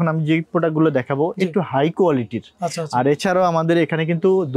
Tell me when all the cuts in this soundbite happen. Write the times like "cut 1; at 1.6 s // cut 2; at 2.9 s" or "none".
none